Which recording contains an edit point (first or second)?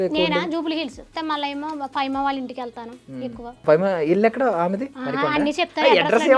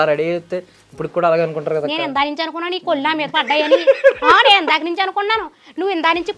first